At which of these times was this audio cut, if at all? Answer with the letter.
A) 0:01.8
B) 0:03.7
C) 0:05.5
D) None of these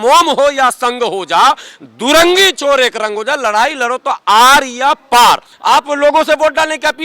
C